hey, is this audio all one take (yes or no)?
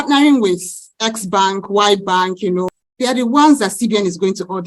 no